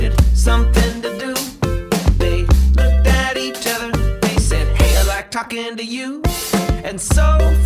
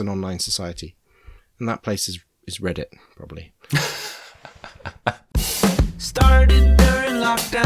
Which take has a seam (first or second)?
second